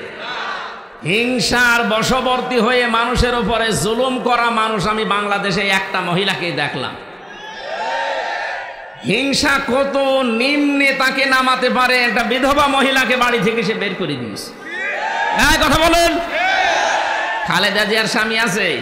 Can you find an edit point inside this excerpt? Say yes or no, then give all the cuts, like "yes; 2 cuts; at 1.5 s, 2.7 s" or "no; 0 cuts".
yes; 1 cut; at 1.1 s